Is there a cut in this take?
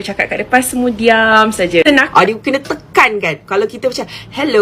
yes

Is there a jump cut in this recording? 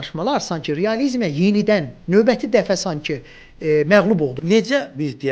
yes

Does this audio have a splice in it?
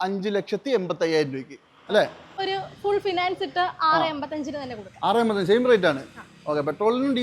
yes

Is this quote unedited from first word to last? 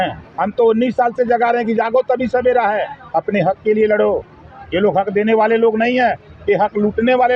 yes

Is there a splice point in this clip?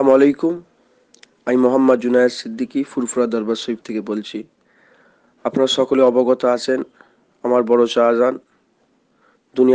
no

